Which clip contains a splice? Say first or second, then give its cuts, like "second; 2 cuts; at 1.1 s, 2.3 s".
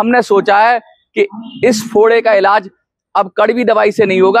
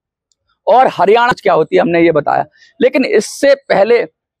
second; 1 cut; at 1.3 s